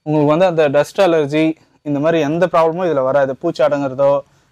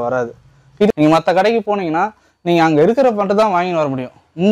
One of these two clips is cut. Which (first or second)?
second